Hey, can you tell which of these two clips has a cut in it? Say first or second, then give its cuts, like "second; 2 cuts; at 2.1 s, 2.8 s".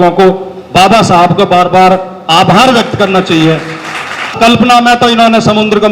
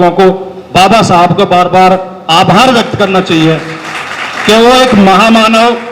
first; 1 cut; at 4.3 s